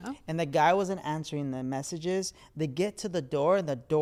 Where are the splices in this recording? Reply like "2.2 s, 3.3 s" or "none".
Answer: none

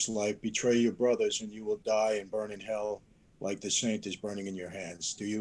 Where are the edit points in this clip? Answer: none

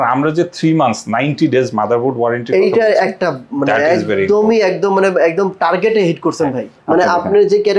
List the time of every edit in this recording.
6.7 s

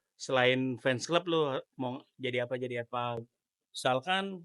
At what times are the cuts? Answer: 3.4 s

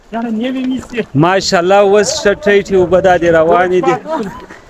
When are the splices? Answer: none

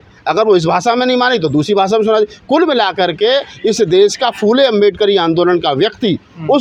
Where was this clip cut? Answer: none

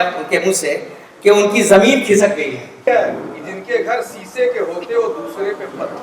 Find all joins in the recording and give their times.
2.7 s

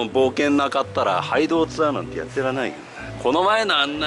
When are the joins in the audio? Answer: none

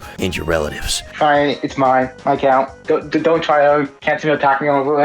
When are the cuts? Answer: 1.0 s, 2.8 s

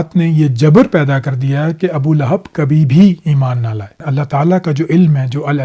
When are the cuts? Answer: 4.0 s

